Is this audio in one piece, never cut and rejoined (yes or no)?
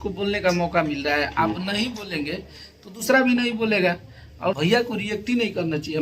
no